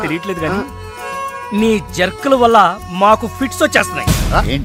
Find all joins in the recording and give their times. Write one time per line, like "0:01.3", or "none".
none